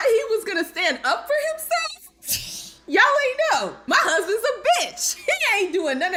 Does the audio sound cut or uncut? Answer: uncut